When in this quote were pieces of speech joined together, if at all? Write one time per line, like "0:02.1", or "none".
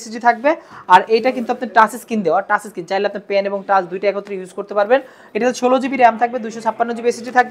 0:05.2